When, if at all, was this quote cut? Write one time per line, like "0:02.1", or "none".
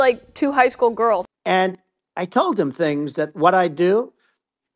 0:01.3